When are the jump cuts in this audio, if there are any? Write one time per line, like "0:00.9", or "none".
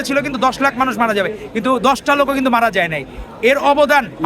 none

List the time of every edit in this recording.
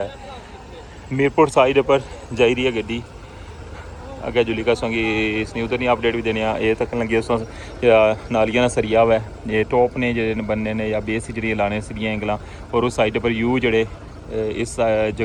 none

